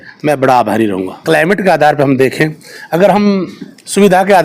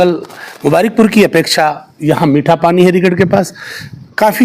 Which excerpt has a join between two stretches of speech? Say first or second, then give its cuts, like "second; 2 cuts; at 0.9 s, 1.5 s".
first; 1 cut; at 1.2 s